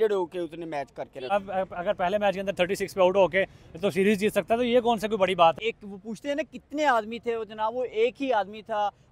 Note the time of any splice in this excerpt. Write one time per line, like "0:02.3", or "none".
0:01.3
0:05.6